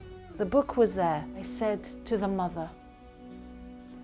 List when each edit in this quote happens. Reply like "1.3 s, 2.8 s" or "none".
1.4 s